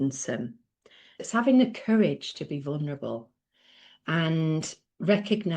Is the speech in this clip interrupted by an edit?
yes; 1 cut; at 1.2 s

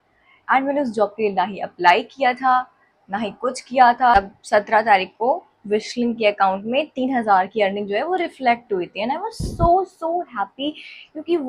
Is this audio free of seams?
no; 1 cut; at 4.1 s

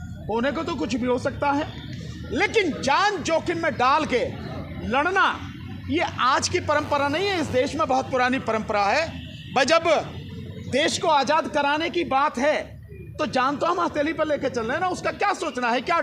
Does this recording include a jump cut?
no; 0 cuts

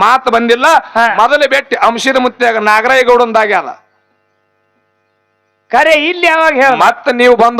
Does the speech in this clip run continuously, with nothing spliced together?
yes; 0 cuts

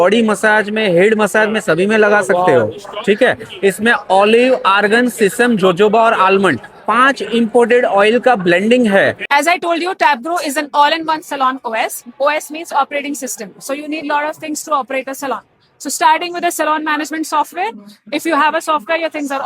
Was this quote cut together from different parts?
yes; 1 cut; at 9.2 s

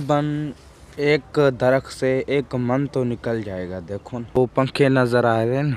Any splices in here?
yes; 1 cut; at 4.4 s

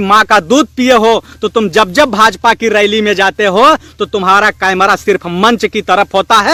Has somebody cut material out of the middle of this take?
no; 0 cuts

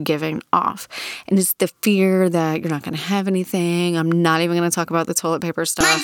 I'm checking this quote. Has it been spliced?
no; 0 cuts

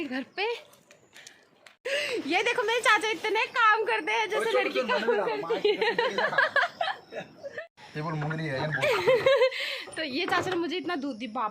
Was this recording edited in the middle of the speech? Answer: yes; 2 cuts; at 1.7 s, 7.6 s

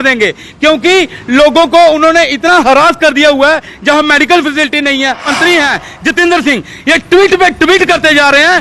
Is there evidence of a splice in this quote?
yes; 1 cut; at 5.3 s

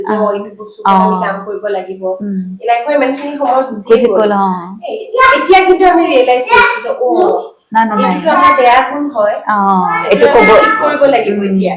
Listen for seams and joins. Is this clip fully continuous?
yes; 0 cuts

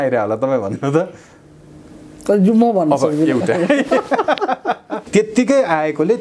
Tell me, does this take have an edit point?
yes; 1 cut; at 4.9 s

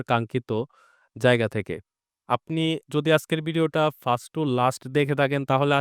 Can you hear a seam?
yes; 1 cut; at 2.0 s

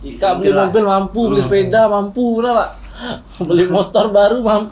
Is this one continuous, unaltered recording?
yes; 0 cuts

